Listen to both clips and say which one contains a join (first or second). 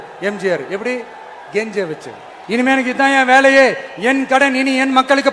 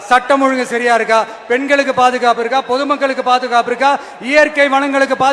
first